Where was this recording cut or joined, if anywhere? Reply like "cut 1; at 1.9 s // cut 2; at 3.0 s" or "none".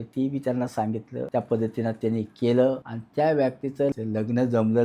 cut 1; at 1.3 s // cut 2; at 3.0 s // cut 3; at 3.9 s